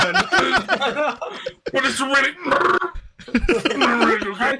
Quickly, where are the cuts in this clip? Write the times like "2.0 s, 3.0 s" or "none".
none